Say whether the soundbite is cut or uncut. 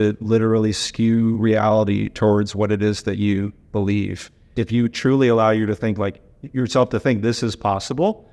cut